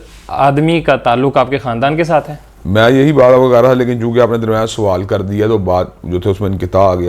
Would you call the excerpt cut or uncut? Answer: uncut